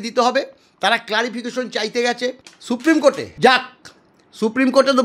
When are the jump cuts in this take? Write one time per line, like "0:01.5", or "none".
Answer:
0:02.5
0:03.3